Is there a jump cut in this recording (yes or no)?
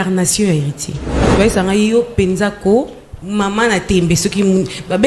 yes